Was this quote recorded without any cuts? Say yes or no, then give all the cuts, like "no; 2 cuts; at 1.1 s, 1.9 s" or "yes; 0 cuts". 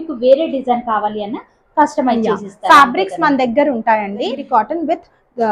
no; 1 cut; at 4.4 s